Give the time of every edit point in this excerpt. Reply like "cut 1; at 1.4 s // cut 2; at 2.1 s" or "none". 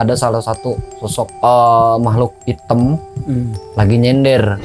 cut 1; at 1.3 s // cut 2; at 2.4 s // cut 3; at 3.6 s